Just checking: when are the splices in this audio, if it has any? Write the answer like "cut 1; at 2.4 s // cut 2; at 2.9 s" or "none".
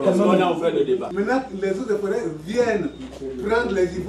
cut 1; at 1.1 s